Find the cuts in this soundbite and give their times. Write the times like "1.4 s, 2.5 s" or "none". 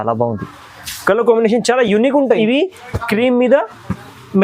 2.4 s